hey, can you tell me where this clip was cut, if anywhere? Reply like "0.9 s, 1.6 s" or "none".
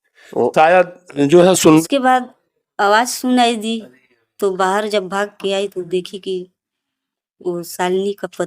1.8 s

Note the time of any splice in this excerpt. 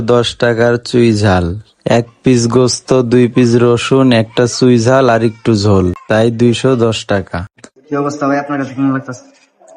7.6 s

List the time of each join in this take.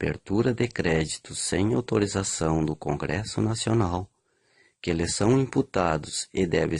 1.7 s

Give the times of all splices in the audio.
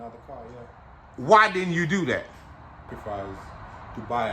2.9 s

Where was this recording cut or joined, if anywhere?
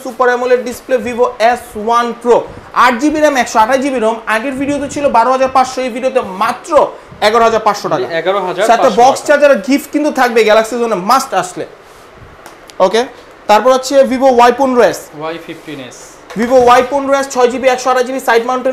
none

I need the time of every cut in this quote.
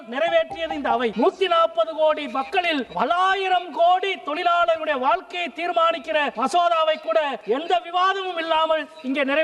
1.1 s, 2.9 s, 6.3 s, 7.4 s

